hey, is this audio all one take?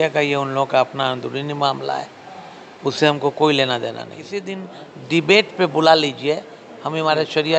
no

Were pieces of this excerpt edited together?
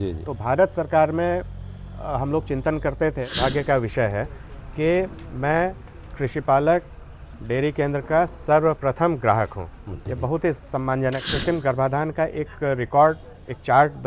yes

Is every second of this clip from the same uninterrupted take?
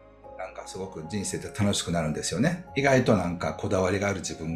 no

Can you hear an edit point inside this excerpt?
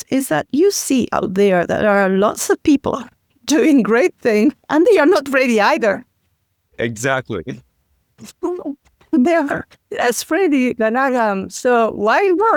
no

